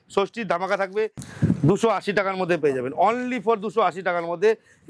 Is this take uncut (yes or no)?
no